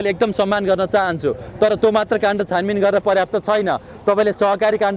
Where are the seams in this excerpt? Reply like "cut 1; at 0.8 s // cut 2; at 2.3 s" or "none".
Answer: none